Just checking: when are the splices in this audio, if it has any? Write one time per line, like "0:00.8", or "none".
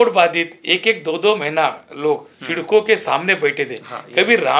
none